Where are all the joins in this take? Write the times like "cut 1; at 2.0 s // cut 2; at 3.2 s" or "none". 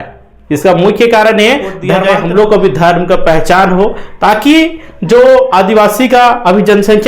cut 1; at 1.9 s